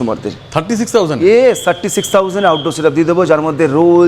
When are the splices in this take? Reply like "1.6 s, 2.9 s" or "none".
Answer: none